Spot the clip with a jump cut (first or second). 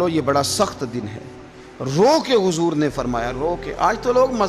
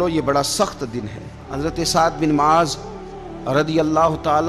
second